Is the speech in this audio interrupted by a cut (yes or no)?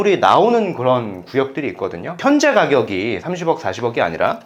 yes